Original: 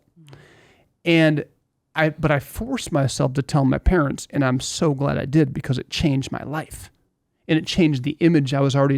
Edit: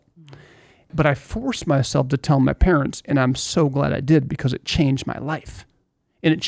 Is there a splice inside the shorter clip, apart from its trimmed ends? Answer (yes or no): yes